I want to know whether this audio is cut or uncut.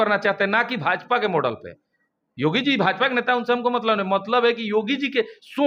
uncut